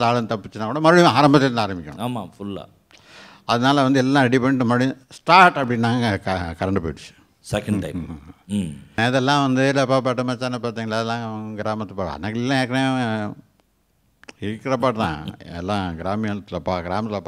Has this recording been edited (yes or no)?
yes